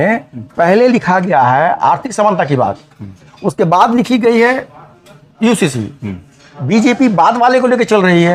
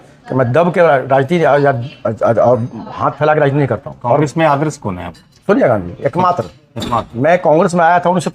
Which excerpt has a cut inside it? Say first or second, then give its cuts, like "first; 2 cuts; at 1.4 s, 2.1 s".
second; 2 cuts; at 3.9 s, 7.1 s